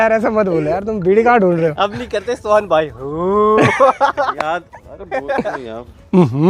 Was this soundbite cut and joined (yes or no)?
no